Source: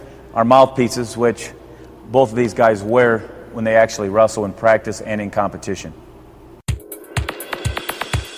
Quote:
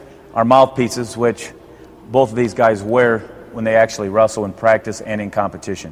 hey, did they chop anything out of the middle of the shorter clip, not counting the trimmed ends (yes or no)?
no